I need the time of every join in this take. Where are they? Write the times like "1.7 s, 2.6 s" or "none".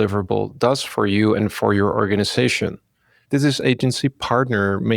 3.1 s